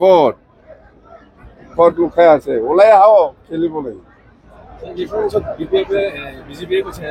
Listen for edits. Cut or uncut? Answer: uncut